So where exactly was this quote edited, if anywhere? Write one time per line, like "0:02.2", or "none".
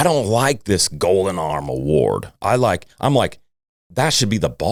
none